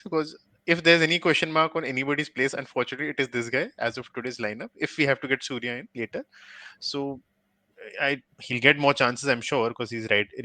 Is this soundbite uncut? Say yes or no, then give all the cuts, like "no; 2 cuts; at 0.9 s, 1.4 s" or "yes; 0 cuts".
yes; 0 cuts